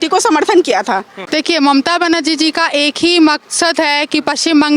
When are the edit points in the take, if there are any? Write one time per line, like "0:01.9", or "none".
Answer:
0:01.2